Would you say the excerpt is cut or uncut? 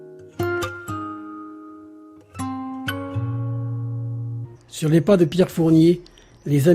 uncut